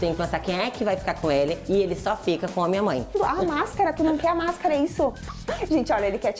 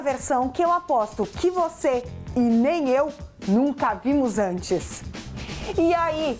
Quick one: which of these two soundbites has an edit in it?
first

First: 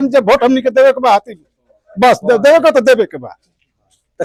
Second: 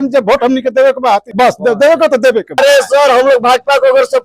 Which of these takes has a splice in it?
second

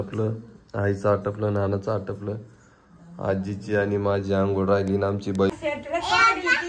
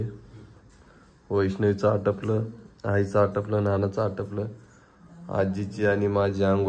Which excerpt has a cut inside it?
first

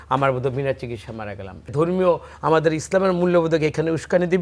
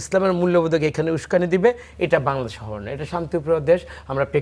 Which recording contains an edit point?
first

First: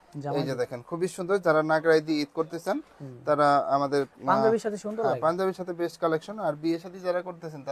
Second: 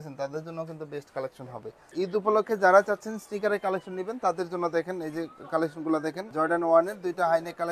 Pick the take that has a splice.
second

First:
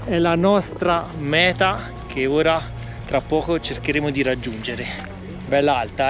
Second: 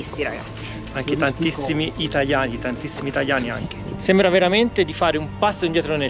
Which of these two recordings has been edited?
second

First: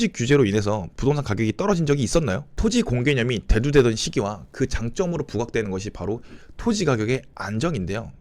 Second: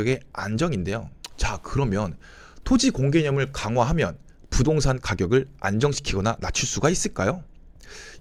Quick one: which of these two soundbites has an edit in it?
first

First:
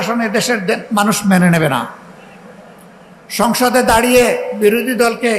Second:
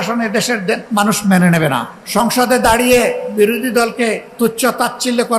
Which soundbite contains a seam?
second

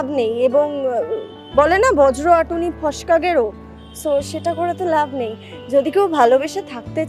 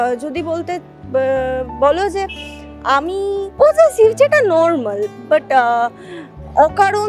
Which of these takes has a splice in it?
second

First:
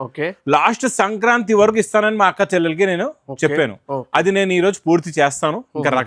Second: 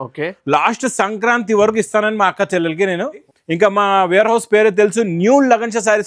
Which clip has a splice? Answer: second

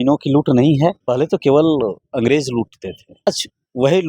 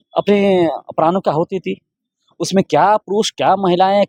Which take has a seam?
first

